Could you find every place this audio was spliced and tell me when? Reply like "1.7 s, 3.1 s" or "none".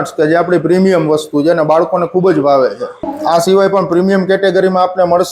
3.1 s